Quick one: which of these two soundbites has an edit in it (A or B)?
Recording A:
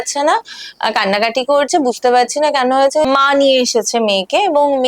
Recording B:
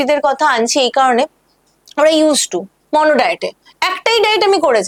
A